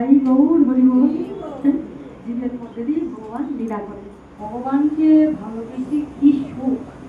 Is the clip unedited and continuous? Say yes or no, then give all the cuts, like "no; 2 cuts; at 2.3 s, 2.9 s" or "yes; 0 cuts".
no; 1 cut; at 4.4 s